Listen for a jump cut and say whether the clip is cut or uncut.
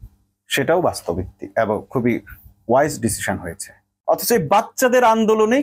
cut